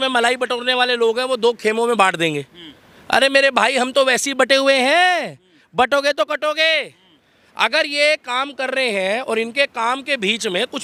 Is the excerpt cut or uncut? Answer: uncut